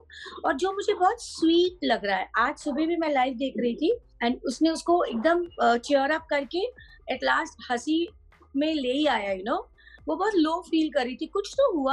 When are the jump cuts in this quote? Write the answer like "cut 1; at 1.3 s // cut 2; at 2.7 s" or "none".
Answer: cut 1; at 4.1 s